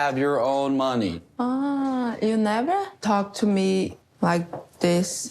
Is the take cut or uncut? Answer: cut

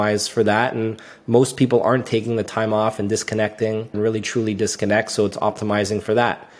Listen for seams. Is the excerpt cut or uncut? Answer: cut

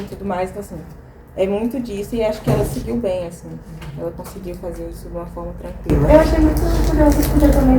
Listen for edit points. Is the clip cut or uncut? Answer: uncut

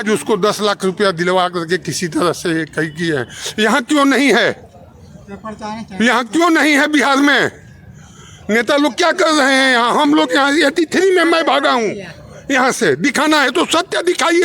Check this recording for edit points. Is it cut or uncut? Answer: uncut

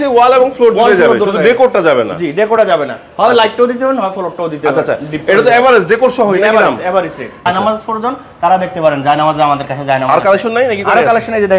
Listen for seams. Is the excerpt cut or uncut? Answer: cut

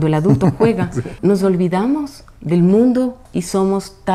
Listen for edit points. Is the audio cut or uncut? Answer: cut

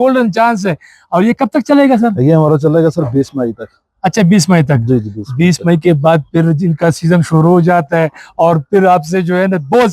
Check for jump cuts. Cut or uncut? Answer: uncut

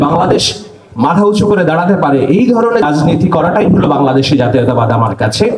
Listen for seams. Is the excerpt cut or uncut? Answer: cut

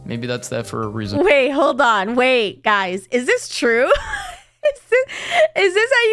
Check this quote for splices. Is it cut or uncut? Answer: uncut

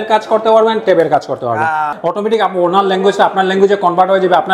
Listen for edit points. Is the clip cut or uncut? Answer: cut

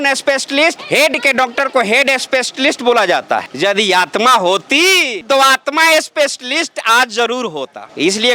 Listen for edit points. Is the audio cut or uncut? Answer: uncut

